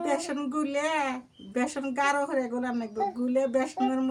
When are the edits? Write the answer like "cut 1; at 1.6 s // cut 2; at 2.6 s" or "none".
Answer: none